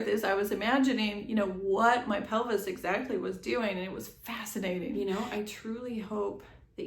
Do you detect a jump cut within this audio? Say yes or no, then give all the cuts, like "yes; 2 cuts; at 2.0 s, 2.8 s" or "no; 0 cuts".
yes; 1 cut; at 5.0 s